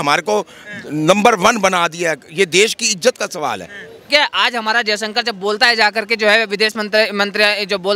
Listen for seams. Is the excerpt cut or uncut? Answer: cut